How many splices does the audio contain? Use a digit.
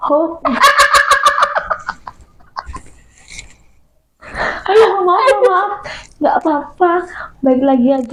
0